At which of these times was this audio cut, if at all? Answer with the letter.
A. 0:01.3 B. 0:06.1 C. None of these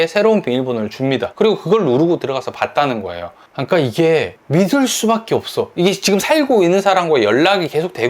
A